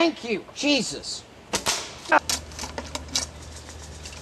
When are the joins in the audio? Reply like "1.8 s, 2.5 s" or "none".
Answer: 2.1 s

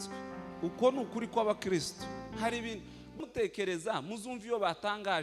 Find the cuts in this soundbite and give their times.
3.2 s

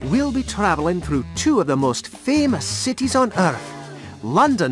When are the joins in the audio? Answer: none

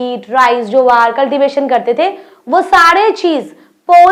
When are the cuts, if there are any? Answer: none

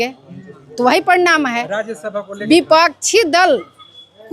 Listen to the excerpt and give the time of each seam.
2.3 s

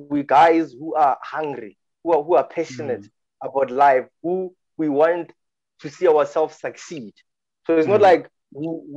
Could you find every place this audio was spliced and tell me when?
none

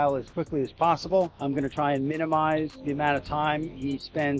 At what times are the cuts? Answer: 1.4 s

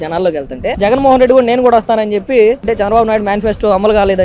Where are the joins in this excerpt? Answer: 2.6 s

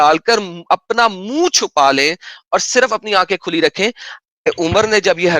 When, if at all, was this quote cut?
4.5 s

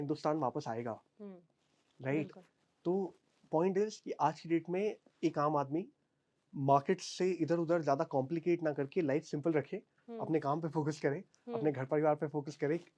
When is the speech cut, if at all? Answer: none

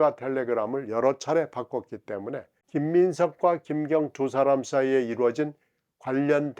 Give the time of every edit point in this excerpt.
2.5 s

